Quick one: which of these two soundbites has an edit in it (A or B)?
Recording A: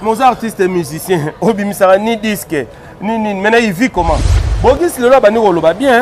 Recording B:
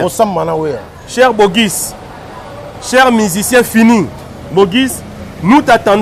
A